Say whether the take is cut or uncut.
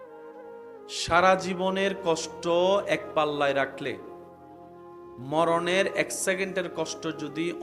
cut